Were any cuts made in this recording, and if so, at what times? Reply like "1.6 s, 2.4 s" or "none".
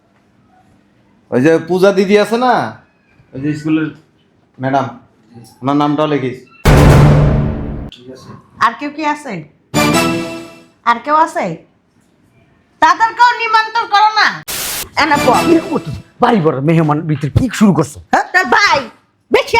14.6 s